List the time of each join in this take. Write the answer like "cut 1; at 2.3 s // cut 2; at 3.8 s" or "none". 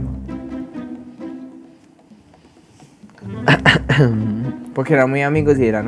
none